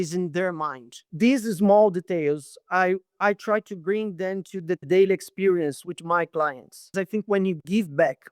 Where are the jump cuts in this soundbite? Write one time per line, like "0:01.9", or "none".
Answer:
0:01.0
0:06.9